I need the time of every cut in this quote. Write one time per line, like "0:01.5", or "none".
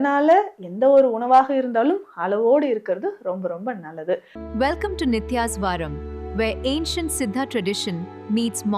0:04.3